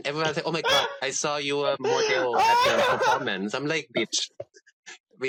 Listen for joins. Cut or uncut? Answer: uncut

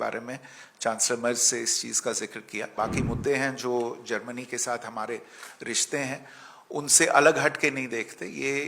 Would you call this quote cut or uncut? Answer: cut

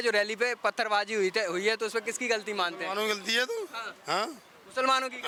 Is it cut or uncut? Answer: uncut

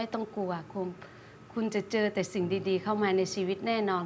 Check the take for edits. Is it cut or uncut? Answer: uncut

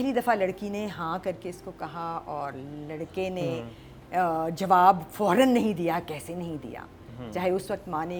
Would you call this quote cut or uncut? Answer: uncut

